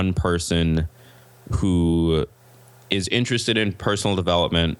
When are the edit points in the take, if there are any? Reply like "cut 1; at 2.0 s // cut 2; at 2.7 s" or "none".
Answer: none

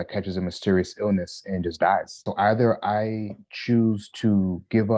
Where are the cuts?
cut 1; at 2.2 s

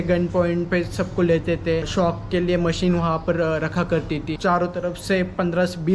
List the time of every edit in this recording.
cut 1; at 1.9 s // cut 2; at 4.3 s

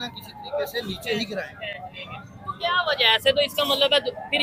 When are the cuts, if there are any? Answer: none

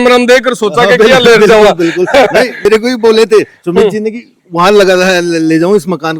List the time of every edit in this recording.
cut 1; at 2.7 s

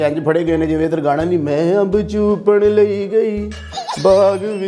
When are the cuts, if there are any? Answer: none

